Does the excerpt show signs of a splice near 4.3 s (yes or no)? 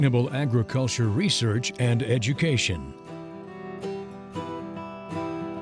no